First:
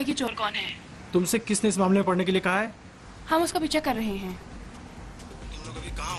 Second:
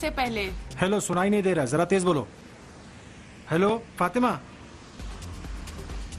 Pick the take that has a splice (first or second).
first